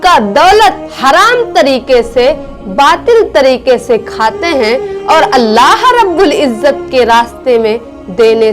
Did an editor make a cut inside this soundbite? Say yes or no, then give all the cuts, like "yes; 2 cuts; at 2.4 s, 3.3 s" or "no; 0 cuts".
no; 0 cuts